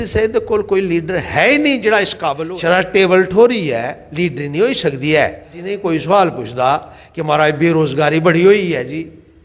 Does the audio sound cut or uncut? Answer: cut